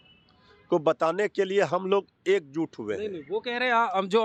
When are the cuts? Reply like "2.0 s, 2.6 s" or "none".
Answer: none